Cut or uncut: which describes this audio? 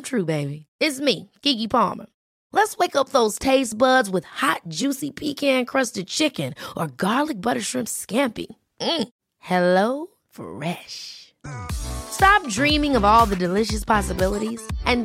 uncut